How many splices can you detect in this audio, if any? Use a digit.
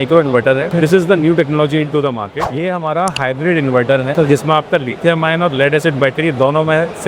1